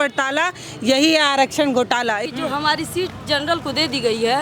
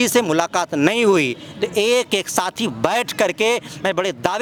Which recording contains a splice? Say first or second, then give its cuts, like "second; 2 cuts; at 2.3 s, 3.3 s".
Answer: first; 1 cut; at 2.3 s